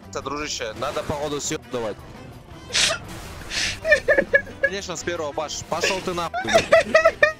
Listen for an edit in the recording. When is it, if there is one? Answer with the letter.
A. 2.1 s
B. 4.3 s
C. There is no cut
A